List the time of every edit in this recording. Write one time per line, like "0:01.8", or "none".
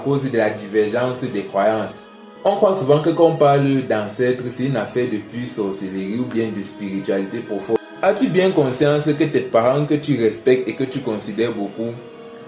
0:02.3
0:07.8